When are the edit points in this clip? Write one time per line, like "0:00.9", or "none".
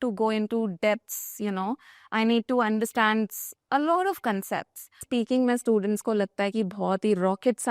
0:05.1